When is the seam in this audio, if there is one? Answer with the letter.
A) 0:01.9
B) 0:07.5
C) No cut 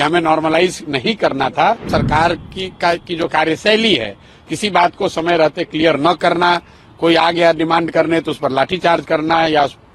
A